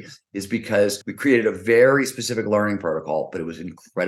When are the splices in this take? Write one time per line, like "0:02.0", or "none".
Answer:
0:01.0